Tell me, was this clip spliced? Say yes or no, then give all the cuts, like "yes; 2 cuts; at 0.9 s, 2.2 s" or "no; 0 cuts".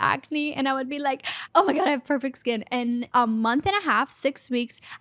yes; 2 cuts; at 1.4 s, 3.1 s